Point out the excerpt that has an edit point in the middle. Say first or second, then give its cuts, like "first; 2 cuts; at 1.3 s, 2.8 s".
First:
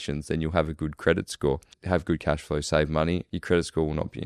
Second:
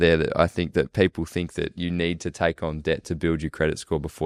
first; 2 cuts; at 1.7 s, 3.3 s